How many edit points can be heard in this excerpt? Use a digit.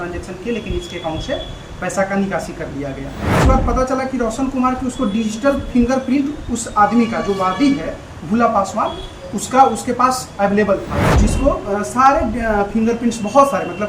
2